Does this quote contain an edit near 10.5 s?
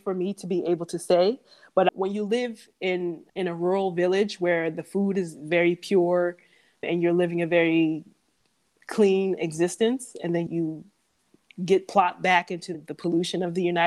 yes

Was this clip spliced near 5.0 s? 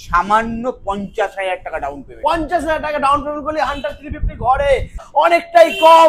yes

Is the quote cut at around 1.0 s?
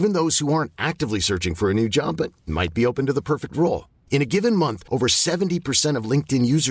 no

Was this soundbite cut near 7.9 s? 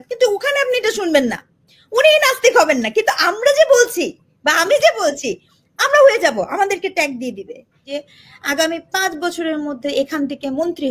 yes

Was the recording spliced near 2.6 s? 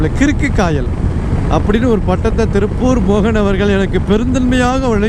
no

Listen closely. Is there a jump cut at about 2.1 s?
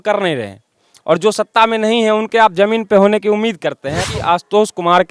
no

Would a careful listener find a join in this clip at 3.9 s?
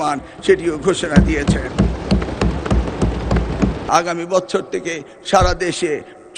yes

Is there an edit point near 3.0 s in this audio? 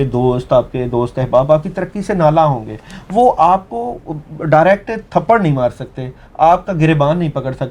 no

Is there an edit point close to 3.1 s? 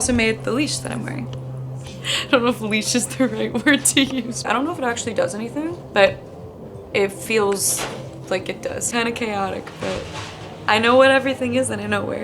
no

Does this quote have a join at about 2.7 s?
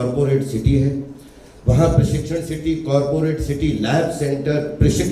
no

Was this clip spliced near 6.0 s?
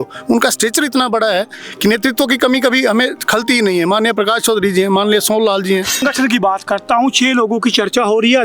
yes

